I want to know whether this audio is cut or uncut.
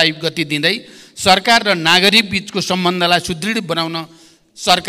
uncut